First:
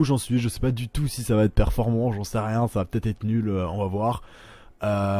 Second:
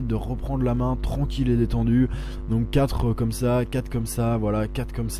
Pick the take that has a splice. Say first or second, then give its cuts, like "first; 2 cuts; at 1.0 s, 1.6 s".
second; 1 cut; at 1.0 s